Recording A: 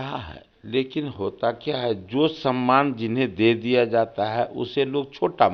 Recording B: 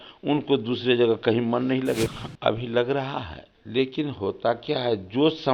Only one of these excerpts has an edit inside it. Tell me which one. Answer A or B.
B